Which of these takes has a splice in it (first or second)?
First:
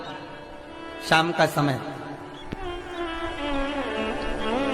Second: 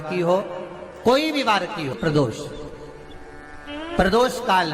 second